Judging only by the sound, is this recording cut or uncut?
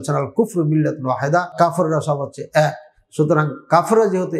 cut